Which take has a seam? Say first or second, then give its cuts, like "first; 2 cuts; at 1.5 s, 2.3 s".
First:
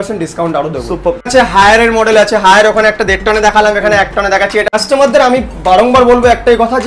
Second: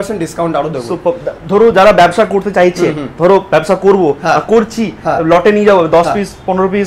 first; 2 cuts; at 1.3 s, 4.6 s